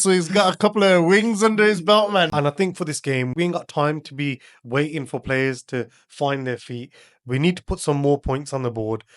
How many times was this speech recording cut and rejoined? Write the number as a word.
one